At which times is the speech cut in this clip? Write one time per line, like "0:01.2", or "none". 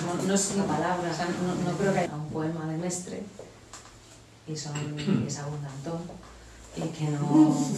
0:02.1